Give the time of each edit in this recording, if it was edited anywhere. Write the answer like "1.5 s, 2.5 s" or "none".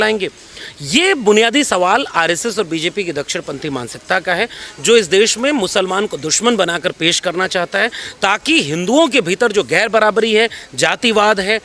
none